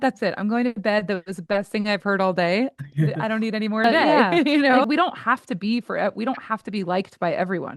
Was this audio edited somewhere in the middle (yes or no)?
yes